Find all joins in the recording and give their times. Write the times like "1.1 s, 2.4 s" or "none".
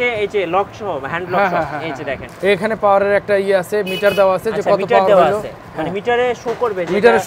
2.3 s